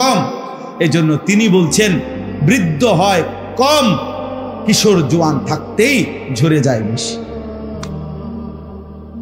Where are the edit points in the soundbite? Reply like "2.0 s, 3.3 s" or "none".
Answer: none